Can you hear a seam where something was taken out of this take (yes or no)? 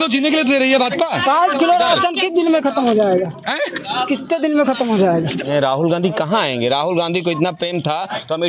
yes